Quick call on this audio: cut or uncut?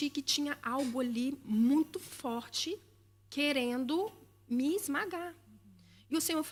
uncut